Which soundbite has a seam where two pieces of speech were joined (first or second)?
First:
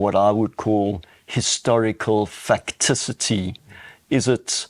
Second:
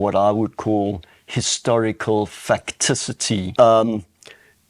second